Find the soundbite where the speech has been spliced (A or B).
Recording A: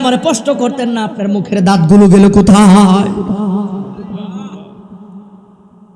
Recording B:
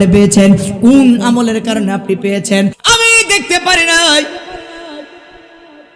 B